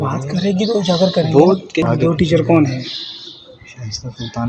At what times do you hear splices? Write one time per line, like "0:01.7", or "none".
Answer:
0:01.8